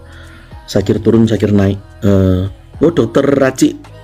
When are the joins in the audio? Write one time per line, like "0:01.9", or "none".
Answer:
none